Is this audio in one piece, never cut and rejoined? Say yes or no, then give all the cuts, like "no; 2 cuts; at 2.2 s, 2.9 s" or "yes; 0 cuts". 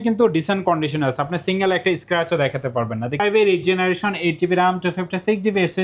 no; 1 cut; at 3.2 s